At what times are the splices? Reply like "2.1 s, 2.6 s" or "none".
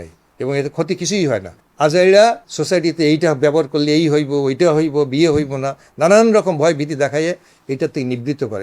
1.6 s, 2.5 s